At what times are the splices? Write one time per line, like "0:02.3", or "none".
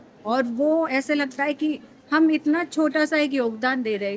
none